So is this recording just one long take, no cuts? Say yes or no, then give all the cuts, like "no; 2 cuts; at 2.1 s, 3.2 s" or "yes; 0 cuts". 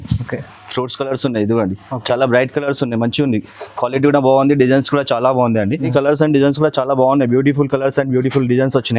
no; 1 cut; at 5.9 s